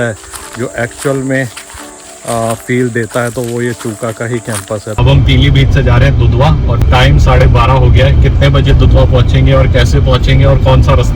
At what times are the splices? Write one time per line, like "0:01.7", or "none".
0:04.9
0:06.8